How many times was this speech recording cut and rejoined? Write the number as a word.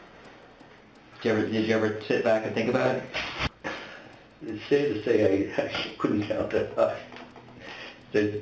one